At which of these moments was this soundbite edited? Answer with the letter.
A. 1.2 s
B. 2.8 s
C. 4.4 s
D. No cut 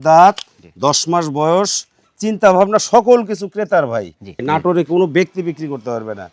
C